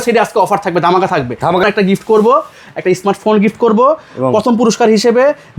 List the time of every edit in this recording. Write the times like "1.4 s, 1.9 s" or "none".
1.6 s

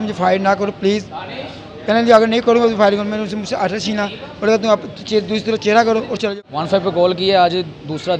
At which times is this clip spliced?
6.3 s

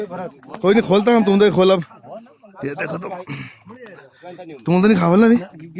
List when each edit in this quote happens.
none

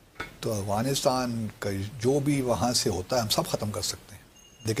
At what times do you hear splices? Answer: none

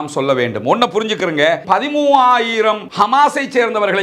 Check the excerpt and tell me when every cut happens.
1.6 s

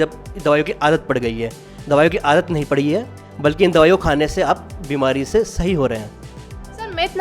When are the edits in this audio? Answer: none

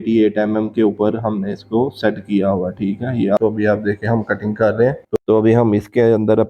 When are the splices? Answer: 3.4 s, 5.2 s

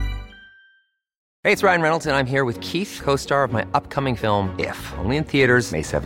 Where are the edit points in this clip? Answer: 1.3 s

